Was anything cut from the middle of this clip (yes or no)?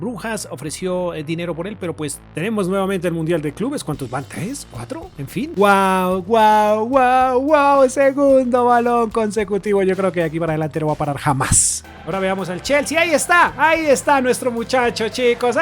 yes